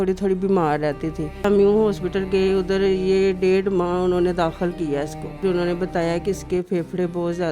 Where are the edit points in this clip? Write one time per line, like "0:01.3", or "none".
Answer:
0:01.4
0:05.4

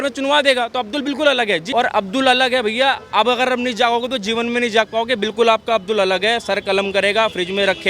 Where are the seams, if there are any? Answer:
0:01.6

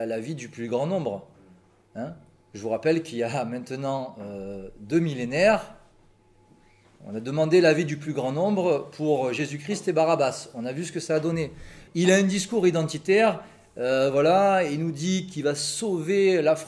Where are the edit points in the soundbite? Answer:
0:11.8

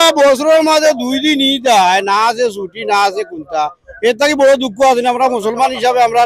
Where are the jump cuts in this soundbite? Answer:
0:03.8

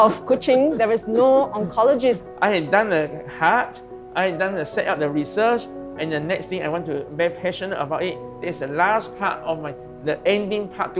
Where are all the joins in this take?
0:02.3

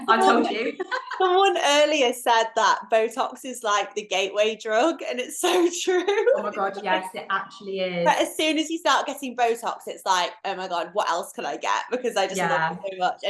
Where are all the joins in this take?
none

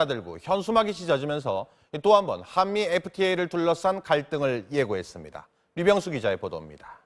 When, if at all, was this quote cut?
none

